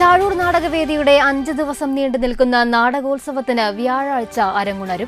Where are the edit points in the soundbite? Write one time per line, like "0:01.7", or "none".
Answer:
none